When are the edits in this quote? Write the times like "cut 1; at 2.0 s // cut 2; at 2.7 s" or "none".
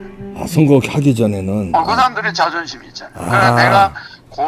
none